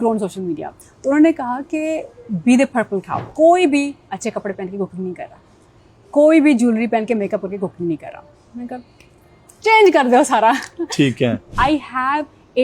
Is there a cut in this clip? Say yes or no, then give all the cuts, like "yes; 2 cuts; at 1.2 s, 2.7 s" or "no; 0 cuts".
yes; 2 cuts; at 3.2 s, 11.5 s